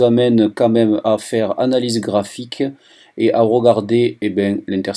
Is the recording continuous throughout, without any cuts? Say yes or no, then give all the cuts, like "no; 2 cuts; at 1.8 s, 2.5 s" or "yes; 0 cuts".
yes; 0 cuts